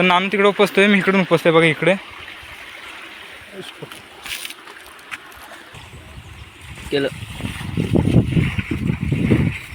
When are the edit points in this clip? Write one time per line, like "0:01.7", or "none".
none